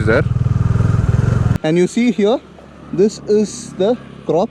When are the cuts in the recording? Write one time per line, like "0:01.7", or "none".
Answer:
0:01.5